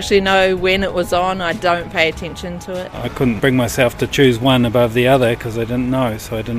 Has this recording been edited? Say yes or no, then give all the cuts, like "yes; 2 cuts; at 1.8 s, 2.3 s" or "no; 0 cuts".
yes; 1 cut; at 3.1 s